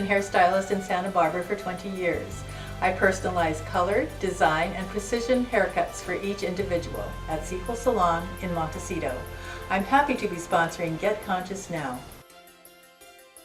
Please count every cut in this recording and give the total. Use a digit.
1